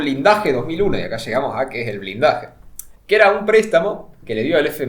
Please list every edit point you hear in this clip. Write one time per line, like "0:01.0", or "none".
none